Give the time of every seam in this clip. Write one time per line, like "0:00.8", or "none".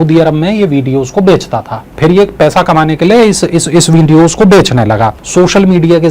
0:01.9
0:05.2